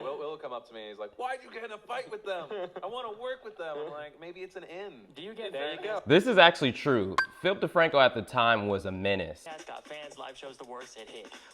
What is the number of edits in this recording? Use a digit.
1